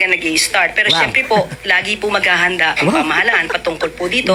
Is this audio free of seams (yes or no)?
yes